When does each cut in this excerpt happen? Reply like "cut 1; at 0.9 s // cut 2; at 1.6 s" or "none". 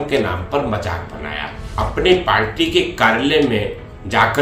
cut 1; at 1.6 s